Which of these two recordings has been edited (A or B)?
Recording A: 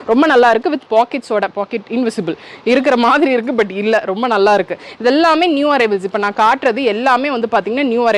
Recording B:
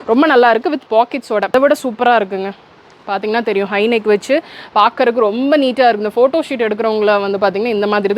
B